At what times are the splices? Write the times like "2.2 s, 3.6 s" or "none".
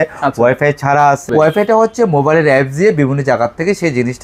1.3 s